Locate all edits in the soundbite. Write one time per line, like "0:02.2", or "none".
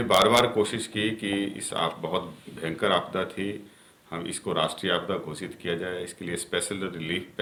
none